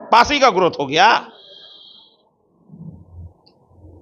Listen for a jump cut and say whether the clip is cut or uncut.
uncut